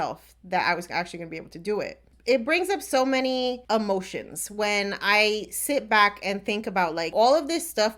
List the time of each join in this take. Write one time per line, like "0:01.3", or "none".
0:02.1
0:03.6
0:07.1